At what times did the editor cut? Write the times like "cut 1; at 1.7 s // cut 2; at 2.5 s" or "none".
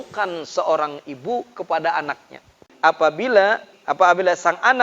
cut 1; at 2.6 s // cut 2; at 3.8 s

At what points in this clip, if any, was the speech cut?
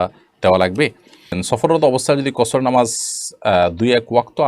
cut 1; at 1.4 s

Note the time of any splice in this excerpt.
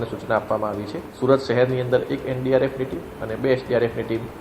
cut 1; at 1.1 s

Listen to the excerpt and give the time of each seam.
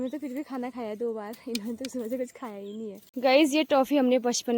cut 1; at 3.0 s

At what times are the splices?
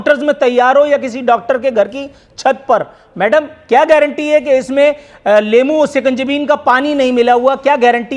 none

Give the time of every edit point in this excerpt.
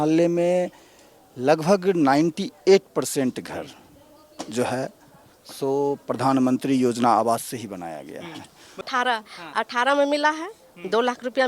cut 1; at 8.8 s

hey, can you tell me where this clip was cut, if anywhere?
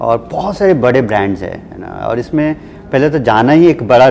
none

